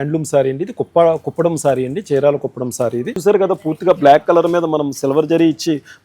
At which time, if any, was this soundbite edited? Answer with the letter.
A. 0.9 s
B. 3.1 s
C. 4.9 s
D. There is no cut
B